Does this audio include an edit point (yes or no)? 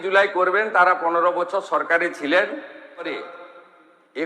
yes